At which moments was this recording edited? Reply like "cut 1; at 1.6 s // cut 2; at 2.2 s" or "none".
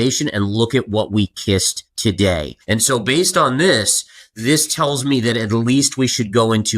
cut 1; at 1.8 s // cut 2; at 2.5 s